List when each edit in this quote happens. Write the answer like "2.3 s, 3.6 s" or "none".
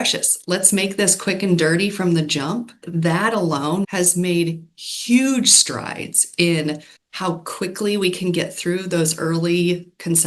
2.8 s, 3.8 s